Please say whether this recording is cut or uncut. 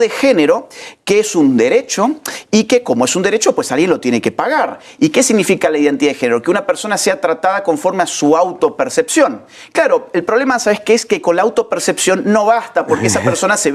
uncut